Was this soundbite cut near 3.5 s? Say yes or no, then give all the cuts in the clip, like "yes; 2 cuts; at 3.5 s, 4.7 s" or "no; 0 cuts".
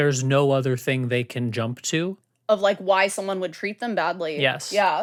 no; 0 cuts